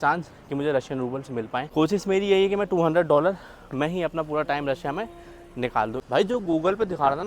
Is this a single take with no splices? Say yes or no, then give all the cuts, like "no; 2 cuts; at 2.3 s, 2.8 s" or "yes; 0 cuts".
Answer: no; 2 cuts; at 1.7 s, 6.0 s